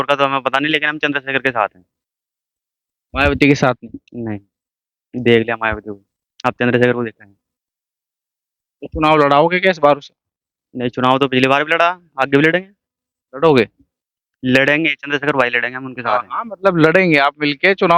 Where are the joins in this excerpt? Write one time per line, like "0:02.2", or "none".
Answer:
none